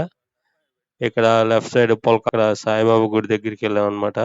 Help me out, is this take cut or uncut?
cut